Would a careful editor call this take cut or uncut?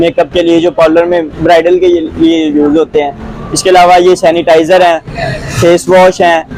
uncut